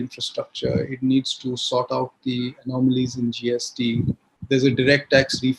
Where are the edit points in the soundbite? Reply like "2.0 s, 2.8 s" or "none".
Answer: none